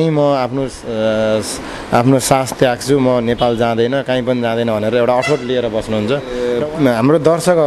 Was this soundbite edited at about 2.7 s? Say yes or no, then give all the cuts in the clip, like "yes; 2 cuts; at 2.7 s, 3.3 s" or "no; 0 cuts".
no; 1 cut; at 6.4 s